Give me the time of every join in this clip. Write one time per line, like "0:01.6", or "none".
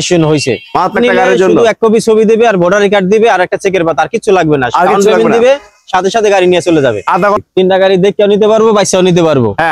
0:00.9
0:07.4